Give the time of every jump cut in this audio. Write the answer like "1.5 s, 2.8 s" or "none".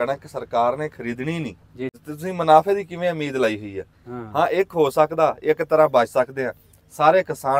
2.0 s